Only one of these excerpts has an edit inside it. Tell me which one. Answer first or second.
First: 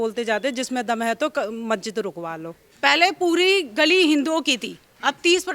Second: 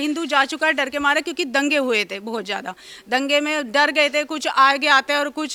first